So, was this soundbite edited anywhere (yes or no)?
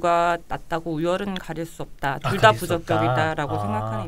no